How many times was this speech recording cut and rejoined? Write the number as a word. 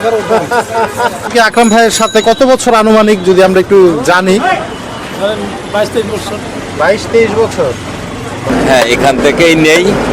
two